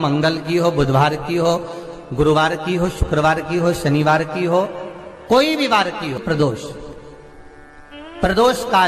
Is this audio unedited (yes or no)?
no